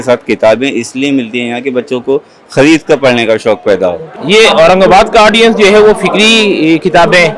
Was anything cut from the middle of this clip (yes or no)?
yes